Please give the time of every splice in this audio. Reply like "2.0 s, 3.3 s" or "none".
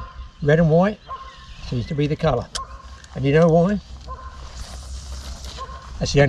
none